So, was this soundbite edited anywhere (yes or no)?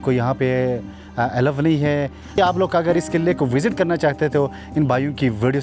yes